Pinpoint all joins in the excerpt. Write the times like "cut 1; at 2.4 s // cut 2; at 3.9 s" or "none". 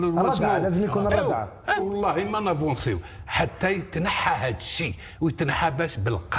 cut 1; at 1.8 s